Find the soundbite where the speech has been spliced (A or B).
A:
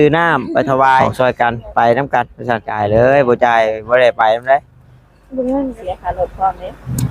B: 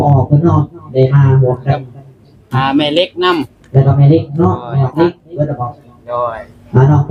A